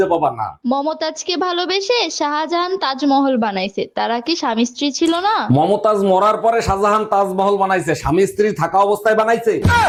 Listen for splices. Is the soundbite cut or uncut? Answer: uncut